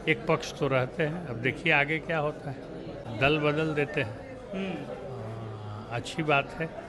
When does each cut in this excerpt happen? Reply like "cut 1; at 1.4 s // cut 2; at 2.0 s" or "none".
cut 1; at 3.0 s